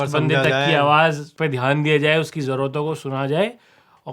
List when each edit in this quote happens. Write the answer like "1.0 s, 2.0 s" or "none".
1.3 s